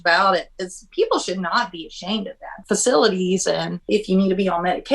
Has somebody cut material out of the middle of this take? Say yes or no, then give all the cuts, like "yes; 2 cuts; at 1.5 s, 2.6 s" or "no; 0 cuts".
yes; 2 cuts; at 2.5 s, 3.8 s